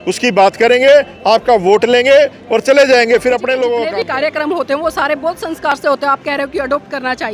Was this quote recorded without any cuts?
no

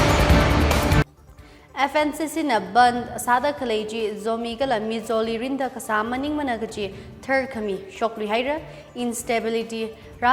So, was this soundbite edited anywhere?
yes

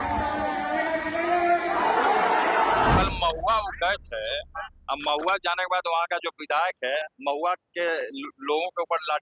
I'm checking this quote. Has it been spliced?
yes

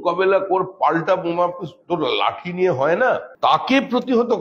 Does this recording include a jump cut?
yes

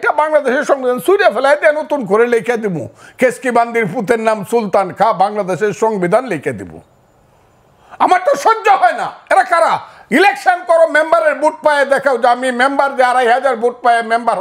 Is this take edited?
no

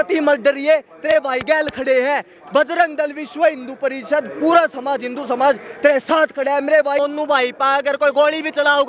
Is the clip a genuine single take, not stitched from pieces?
no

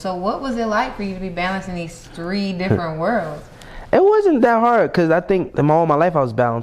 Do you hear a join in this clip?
yes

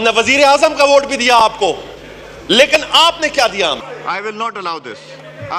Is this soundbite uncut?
yes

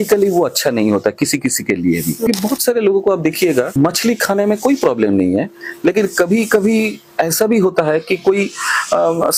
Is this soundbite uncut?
no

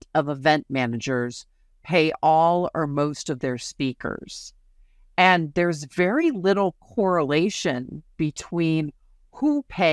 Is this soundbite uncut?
yes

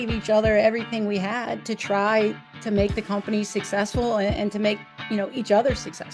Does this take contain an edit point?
no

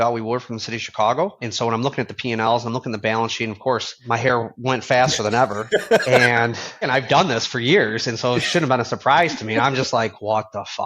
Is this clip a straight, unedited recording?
no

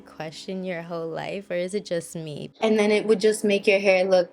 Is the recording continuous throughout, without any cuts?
no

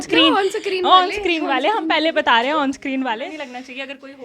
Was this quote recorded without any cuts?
no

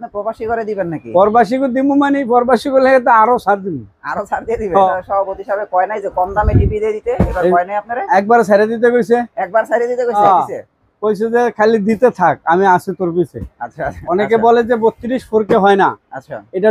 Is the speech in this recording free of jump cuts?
no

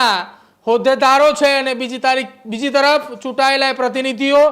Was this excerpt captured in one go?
yes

